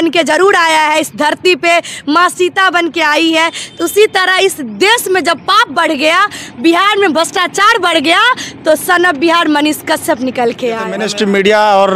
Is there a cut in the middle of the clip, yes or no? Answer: yes